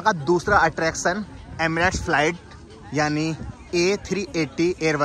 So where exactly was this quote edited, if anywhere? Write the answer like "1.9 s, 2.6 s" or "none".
none